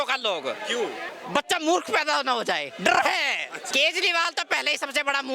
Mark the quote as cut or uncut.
cut